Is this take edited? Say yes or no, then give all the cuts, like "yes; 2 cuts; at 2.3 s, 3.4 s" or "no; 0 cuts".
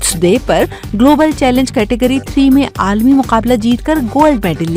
no; 0 cuts